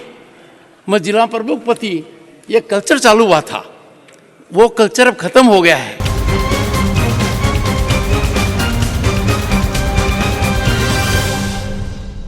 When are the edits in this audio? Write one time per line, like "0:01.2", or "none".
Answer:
0:06.1

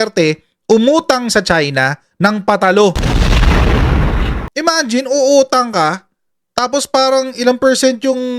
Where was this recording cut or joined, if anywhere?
0:04.4

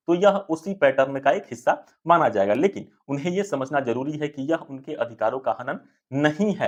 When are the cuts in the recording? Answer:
none

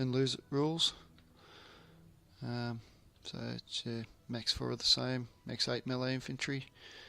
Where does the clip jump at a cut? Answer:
0:03.5

